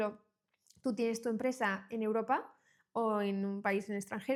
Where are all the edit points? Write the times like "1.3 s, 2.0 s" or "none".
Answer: none